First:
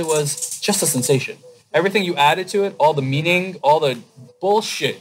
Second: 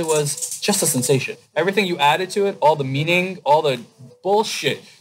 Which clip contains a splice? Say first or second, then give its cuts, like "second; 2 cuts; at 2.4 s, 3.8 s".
second; 1 cut; at 1.4 s